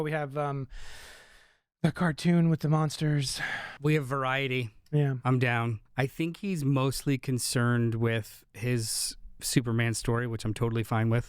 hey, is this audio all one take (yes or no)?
no